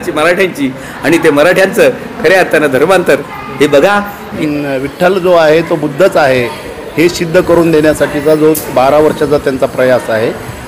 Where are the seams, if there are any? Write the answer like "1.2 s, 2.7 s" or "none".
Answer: 4.3 s